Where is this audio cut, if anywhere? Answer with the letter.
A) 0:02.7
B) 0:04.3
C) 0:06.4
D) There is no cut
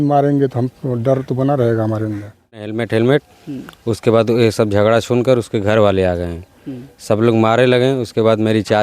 A